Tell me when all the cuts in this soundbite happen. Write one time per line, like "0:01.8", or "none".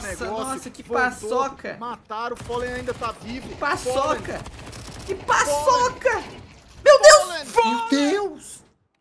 none

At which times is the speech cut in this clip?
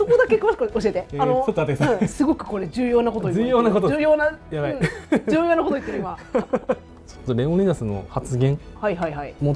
none

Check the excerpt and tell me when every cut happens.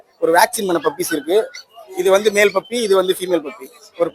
none

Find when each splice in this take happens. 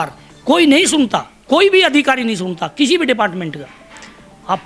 none

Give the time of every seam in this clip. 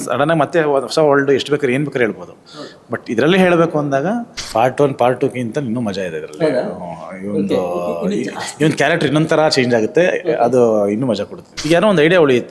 0:04.4
0:11.6

